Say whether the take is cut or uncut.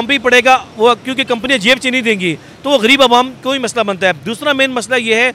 uncut